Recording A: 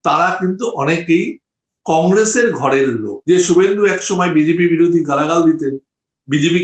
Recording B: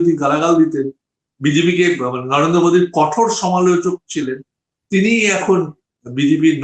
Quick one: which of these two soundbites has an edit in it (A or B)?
A